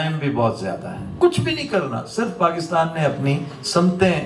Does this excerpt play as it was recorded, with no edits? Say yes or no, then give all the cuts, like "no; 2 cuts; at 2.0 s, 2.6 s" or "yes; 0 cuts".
no; 1 cut; at 1.1 s